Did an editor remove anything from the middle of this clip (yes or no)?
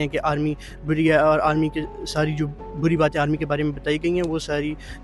no